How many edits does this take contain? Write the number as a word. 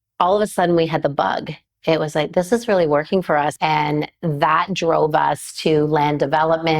one